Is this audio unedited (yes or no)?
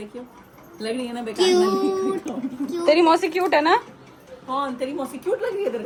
yes